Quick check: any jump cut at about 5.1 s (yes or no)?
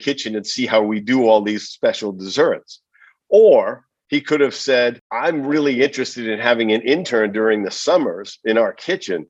yes